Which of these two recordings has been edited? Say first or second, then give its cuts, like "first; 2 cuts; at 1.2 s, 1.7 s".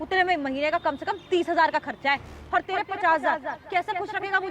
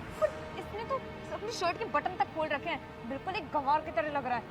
first; 2 cuts; at 2.3 s, 3.5 s